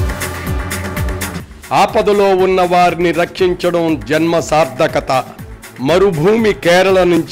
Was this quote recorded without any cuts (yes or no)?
no